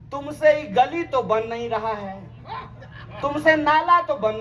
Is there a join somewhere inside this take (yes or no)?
no